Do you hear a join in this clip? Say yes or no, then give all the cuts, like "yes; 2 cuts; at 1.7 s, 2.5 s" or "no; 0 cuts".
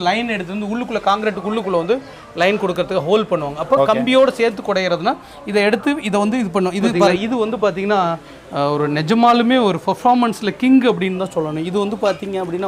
yes; 1 cut; at 7.2 s